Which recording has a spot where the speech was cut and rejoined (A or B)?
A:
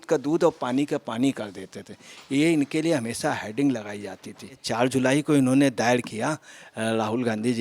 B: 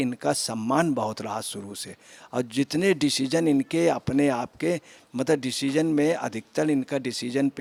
A